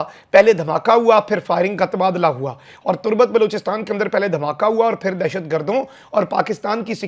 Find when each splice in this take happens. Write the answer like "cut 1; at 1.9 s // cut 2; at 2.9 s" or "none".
none